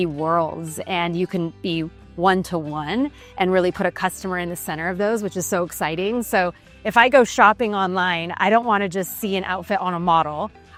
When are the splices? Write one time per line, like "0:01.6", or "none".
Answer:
none